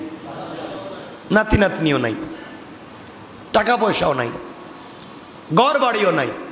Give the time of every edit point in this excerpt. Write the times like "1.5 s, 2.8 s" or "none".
none